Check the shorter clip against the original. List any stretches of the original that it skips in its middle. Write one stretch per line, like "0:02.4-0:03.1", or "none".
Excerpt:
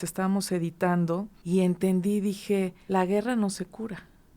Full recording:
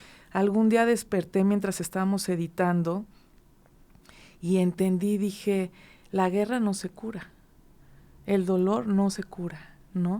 0:03.1-0:04.3
0:05.7-0:06.0